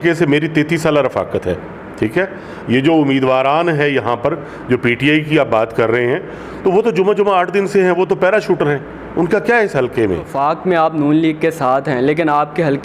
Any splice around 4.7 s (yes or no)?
no